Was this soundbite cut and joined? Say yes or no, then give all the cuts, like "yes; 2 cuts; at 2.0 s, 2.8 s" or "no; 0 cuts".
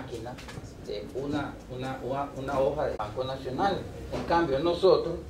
no; 0 cuts